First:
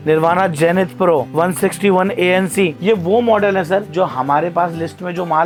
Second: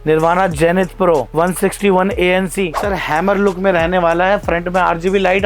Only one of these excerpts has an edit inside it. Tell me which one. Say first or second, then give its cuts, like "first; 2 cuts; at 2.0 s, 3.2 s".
second; 1 cut; at 2.8 s